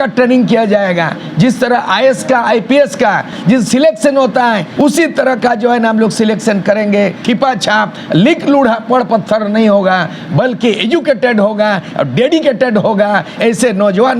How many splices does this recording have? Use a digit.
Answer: 4